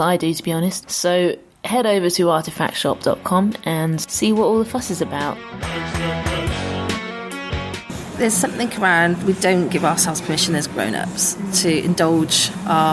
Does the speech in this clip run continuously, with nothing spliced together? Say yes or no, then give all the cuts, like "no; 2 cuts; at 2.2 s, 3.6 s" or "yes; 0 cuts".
no; 2 cuts; at 5.4 s, 8.0 s